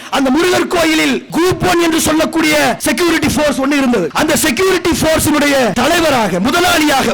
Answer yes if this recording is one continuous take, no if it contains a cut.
no